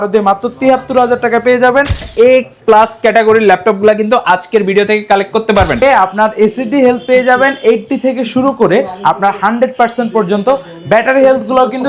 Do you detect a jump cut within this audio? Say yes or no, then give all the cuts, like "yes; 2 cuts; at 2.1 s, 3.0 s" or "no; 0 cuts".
yes; 2 cuts; at 2.0 s, 5.8 s